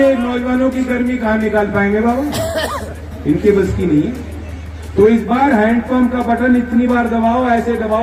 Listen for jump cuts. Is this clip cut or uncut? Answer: uncut